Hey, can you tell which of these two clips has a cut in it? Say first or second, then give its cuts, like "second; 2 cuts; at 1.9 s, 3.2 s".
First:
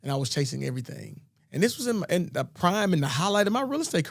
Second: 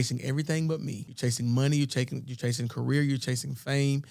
second; 1 cut; at 1.0 s